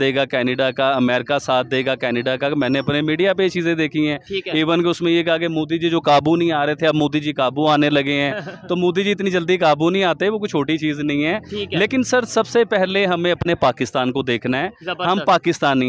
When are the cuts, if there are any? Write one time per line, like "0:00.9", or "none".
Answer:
none